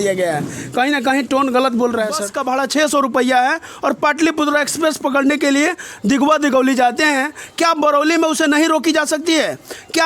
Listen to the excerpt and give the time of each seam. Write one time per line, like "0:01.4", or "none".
0:02.3